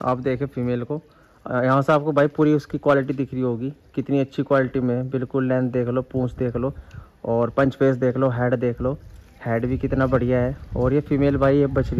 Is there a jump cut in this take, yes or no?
no